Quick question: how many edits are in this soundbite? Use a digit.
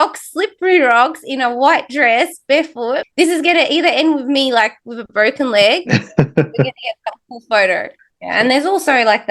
2